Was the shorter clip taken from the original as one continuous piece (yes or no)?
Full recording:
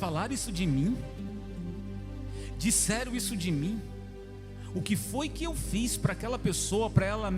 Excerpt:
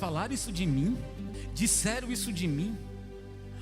no